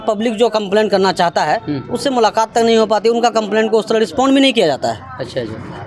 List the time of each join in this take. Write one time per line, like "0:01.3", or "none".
none

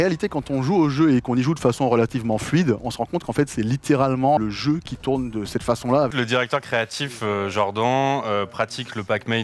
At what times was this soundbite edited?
0:04.4
0:06.1

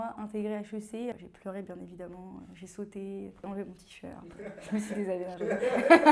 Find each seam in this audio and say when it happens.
0:01.1

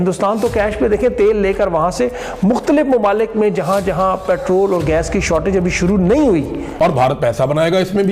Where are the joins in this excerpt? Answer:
0:06.7

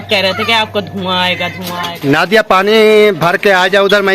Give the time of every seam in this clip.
0:01.9

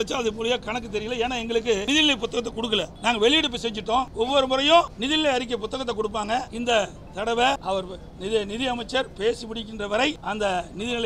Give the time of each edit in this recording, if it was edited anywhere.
0:01.8
0:02.9
0:04.1
0:05.0
0:06.5
0:07.6
0:10.2

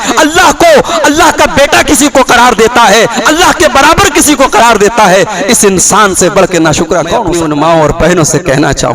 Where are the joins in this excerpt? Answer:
0:07.3

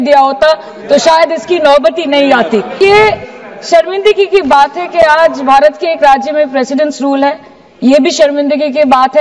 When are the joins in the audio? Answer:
0:02.8

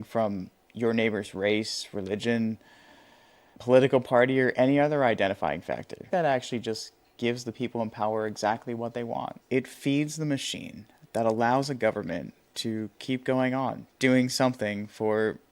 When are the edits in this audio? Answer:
0:05.9
0:09.3
0:13.9

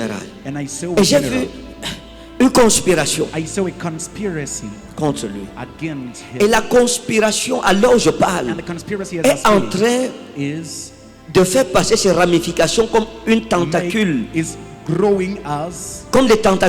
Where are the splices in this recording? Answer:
none

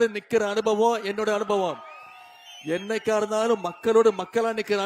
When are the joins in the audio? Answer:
none

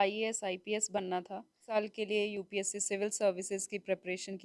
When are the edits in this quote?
0:01.6

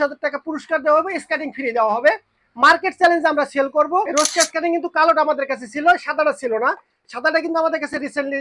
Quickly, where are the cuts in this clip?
0:04.1

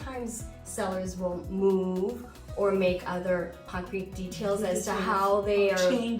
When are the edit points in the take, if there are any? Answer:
0:03.7

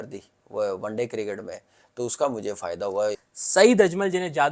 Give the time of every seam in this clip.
0:03.2

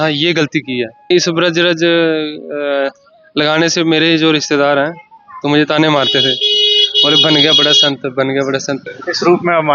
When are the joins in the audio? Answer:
0:01.1
0:08.8

